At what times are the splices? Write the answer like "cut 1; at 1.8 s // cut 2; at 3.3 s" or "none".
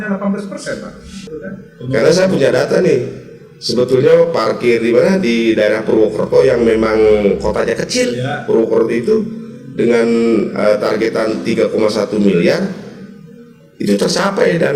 cut 1; at 1.3 s